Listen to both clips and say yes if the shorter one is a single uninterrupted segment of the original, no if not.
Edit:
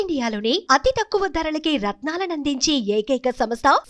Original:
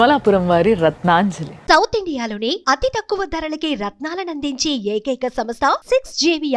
yes